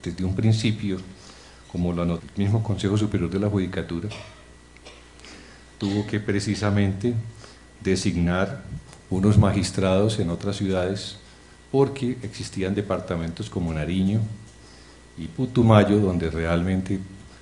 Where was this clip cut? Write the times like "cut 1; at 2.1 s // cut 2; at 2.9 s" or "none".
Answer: none